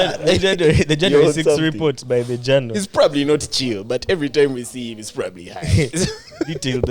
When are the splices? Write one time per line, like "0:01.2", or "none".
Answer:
0:05.9